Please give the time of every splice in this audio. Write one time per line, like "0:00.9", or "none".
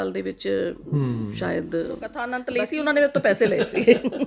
0:02.3